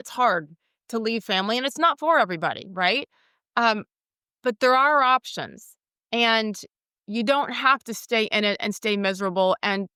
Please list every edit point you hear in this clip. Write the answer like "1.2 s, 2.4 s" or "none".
none